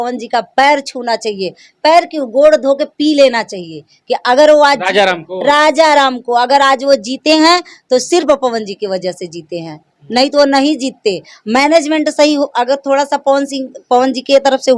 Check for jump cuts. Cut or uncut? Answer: uncut